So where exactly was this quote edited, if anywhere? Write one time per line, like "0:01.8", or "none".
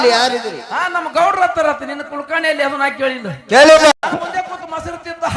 0:03.9